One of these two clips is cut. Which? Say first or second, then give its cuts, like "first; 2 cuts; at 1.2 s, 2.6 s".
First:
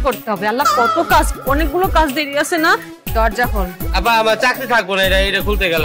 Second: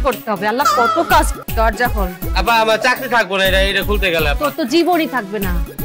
second; 1 cut; at 1.4 s